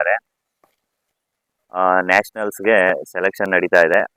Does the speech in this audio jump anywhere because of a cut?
no; 0 cuts

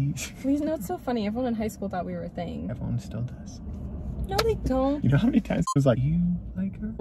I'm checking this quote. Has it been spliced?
no; 0 cuts

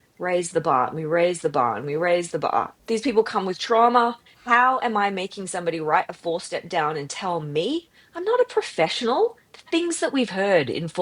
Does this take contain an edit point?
yes; 2 cuts; at 2.7 s, 4.3 s

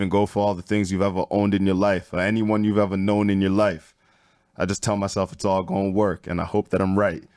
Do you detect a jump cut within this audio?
no; 0 cuts

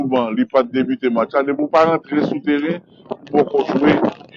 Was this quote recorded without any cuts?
yes; 0 cuts

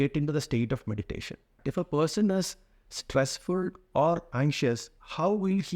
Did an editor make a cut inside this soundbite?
yes; 2 cuts; at 1.5 s, 4.3 s

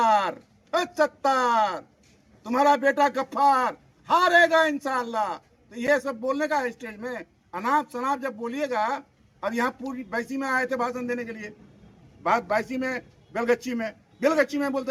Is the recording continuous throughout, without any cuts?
yes; 0 cuts

